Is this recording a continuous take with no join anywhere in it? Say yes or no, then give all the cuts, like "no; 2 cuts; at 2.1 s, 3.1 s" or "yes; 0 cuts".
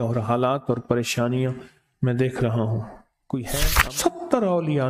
no; 1 cut; at 3.7 s